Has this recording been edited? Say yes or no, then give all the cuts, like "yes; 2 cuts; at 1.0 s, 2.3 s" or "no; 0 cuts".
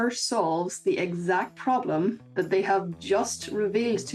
no; 0 cuts